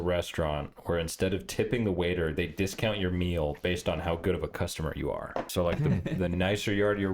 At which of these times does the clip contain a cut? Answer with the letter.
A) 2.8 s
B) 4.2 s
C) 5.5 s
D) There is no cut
C